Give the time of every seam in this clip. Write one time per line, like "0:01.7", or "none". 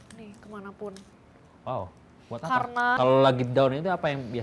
0:03.0